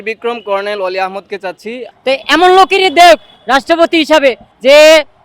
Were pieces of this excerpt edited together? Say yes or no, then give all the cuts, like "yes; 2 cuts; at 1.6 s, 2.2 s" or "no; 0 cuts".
yes; 1 cut; at 1.8 s